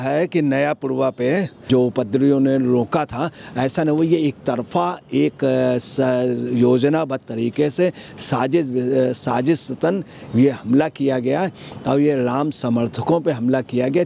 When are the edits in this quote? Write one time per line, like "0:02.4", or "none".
0:01.6